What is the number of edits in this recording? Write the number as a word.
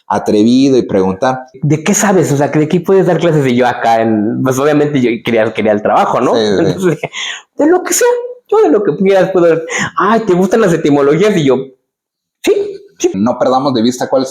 two